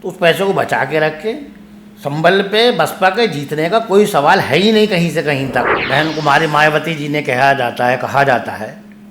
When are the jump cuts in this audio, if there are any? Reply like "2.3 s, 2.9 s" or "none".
5.8 s